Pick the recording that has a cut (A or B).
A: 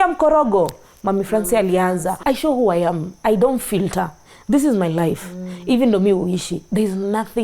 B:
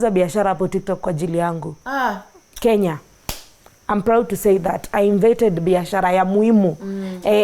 A